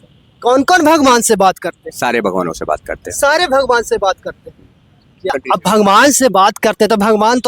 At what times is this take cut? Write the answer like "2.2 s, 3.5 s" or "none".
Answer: 5.3 s